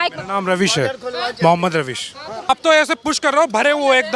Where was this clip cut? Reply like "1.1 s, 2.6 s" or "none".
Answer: 2.5 s

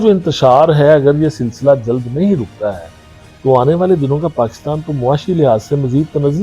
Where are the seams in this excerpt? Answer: none

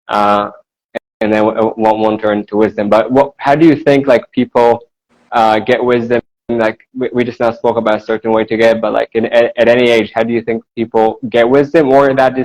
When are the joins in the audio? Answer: none

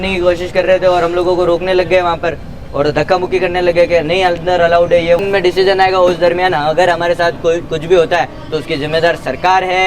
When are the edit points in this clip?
5.2 s

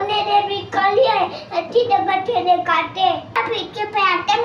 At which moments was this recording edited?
3.4 s

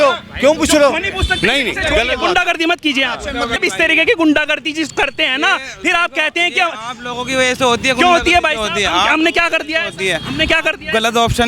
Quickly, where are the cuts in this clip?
3.6 s

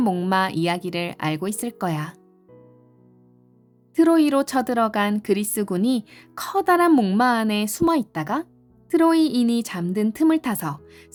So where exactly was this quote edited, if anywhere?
none

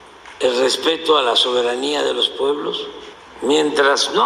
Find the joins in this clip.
none

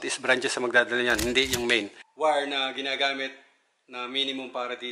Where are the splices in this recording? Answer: 2.0 s

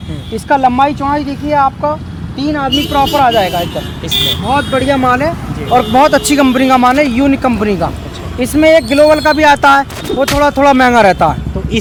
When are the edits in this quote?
none

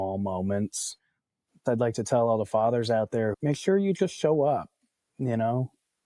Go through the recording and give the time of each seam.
1.6 s, 3.4 s

